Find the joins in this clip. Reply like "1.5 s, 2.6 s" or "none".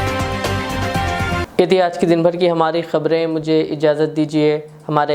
none